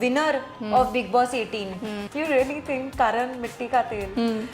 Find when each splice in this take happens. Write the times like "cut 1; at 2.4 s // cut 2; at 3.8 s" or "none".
cut 1; at 1.9 s